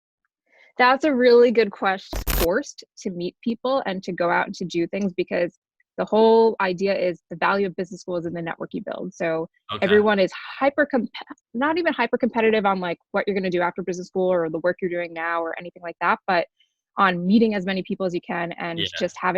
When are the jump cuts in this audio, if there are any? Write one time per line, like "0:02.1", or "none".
0:02.1

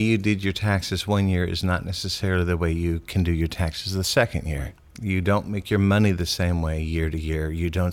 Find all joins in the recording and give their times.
none

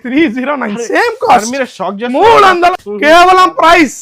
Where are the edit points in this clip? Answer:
0:02.7

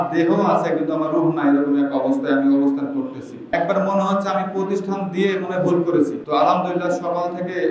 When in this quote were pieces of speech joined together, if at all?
0:03.5
0:06.2

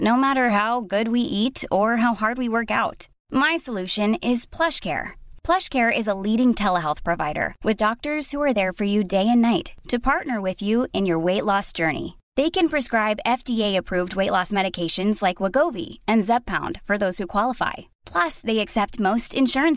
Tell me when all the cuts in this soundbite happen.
none

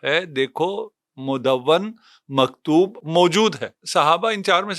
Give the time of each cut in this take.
0:03.7

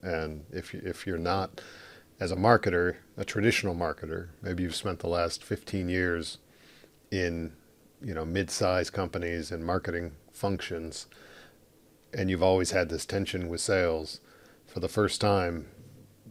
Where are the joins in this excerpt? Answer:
none

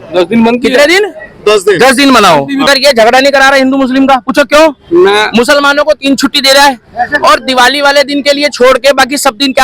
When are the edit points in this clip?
0:02.7

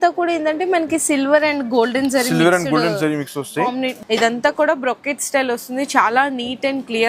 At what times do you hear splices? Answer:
0:04.0

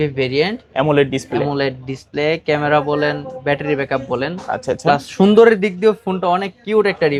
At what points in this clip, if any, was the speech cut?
none

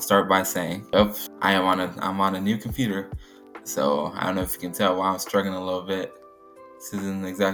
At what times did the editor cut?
none

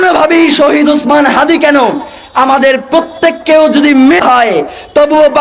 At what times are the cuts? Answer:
0:04.2

